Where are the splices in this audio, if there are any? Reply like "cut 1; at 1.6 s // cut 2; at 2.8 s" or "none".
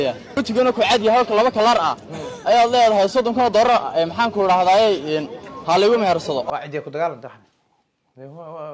cut 1; at 6.4 s